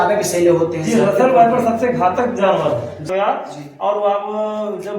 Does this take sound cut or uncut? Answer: cut